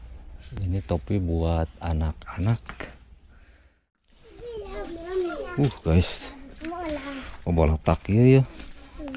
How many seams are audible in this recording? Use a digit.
1